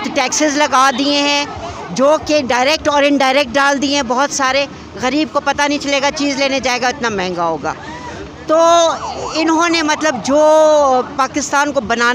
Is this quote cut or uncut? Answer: uncut